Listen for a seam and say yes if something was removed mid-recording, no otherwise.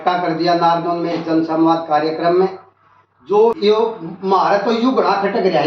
yes